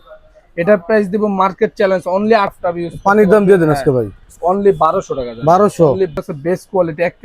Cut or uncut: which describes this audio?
cut